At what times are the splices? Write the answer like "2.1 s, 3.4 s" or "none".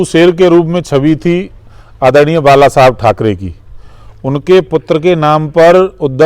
none